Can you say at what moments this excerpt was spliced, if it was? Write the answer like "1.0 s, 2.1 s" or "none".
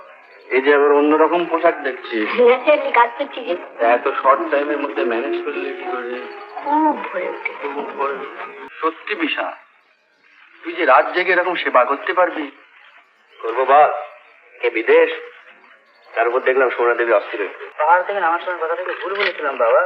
8.6 s, 17.6 s